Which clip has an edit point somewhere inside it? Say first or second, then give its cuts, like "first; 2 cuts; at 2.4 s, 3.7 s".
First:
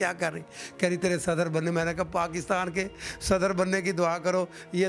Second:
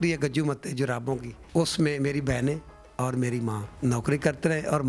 second; 2 cuts; at 1.3 s, 3.7 s